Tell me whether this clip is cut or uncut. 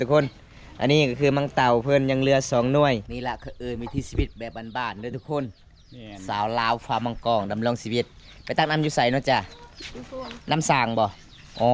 cut